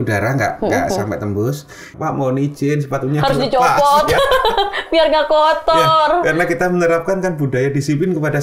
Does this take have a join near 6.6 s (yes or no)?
no